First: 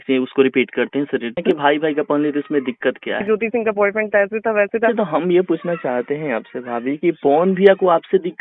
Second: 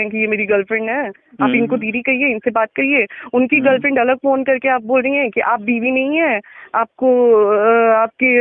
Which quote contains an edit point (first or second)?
first